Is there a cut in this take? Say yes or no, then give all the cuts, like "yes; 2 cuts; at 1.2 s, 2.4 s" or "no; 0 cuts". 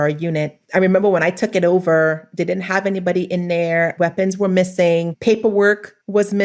no; 0 cuts